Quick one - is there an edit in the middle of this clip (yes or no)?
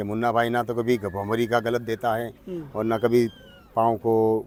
no